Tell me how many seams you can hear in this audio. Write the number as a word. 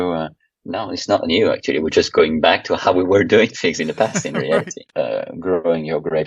one